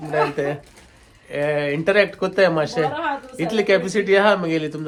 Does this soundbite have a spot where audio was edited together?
no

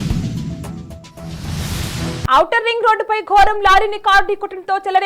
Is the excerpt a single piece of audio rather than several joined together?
no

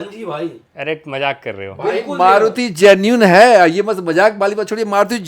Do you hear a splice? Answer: no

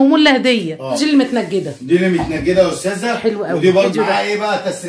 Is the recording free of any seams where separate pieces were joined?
no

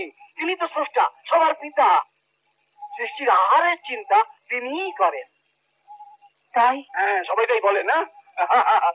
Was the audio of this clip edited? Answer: no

